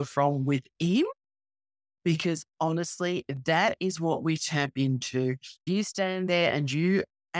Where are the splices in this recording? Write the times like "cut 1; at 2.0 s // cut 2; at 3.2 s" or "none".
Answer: cut 1; at 5.6 s